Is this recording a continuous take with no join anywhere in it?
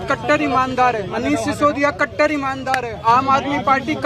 no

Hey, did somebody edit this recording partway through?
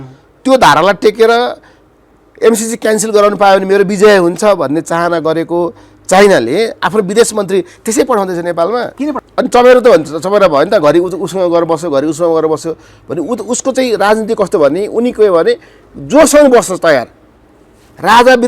yes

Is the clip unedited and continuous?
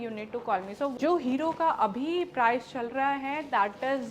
no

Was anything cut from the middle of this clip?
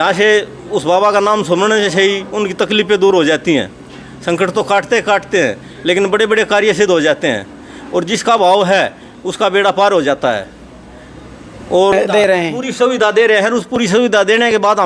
yes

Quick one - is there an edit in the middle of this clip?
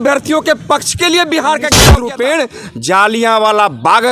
yes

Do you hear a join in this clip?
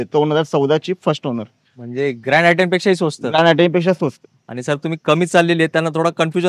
no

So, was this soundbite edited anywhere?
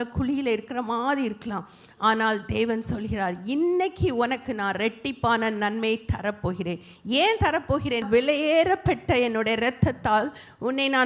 yes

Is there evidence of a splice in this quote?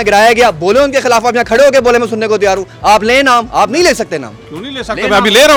no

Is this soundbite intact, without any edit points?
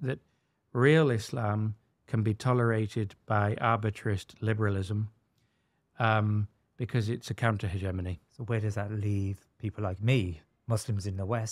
yes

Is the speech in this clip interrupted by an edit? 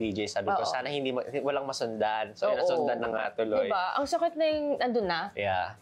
no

